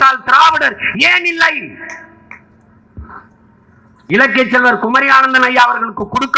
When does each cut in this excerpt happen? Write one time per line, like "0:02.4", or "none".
none